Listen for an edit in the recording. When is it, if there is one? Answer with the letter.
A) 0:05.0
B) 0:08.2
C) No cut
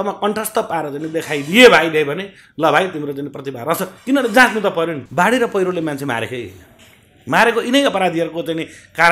A